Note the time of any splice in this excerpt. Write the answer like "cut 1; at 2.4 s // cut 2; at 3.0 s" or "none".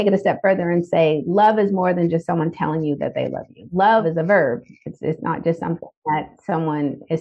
cut 1; at 4.0 s